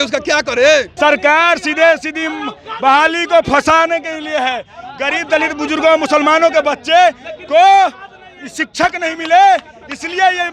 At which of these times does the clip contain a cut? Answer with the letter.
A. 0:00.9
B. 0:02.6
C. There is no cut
A